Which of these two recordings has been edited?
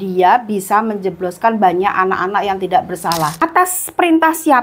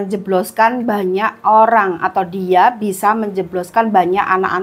first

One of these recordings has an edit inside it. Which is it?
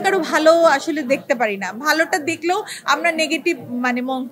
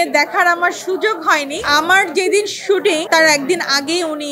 second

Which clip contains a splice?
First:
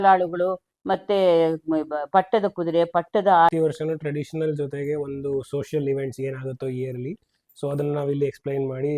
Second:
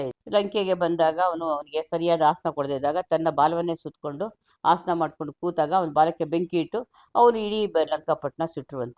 first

